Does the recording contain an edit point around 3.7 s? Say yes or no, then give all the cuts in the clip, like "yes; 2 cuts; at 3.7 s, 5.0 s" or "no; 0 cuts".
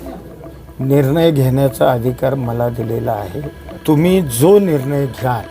yes; 1 cut; at 3.7 s